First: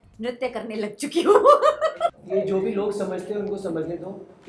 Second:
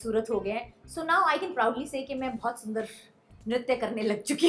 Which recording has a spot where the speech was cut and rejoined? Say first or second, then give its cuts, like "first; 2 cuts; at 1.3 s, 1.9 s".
first; 1 cut; at 2.2 s